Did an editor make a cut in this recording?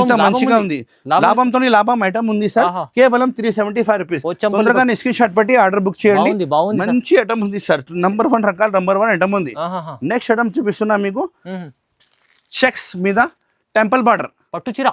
no; 0 cuts

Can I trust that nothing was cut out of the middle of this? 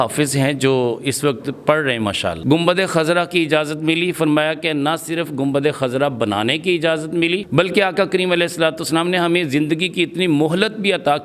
no; 1 cut; at 2.4 s

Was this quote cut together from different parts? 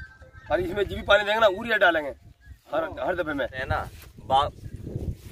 yes; 1 cut; at 3.6 s

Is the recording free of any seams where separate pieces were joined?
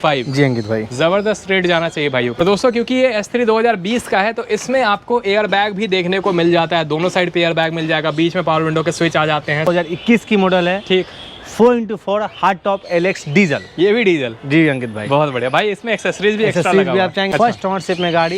no; 3 cuts; at 2.4 s, 9.7 s, 17.3 s

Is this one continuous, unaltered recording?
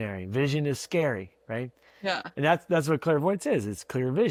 yes; 0 cuts

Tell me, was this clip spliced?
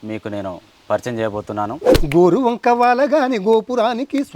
yes; 1 cut; at 1.9 s

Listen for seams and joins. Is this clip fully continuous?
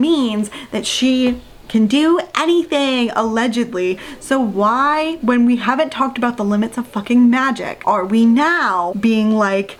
yes; 0 cuts

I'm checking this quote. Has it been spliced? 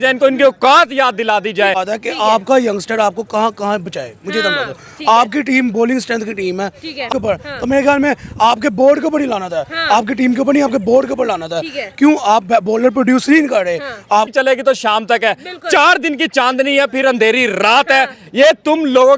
yes; 3 cuts; at 1.8 s, 7.1 s, 14.3 s

